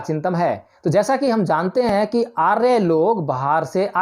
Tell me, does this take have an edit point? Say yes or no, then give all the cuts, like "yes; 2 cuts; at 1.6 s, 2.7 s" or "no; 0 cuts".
no; 0 cuts